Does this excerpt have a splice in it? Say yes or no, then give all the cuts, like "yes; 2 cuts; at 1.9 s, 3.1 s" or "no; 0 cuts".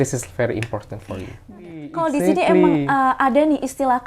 yes; 1 cut; at 1.9 s